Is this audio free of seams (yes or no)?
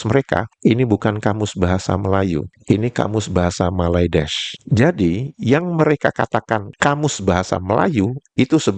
no